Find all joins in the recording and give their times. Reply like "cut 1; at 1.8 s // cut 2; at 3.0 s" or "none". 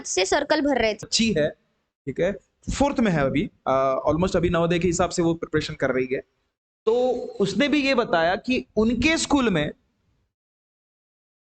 cut 1; at 1.0 s